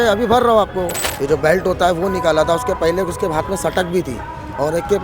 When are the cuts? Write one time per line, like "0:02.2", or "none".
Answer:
0:01.0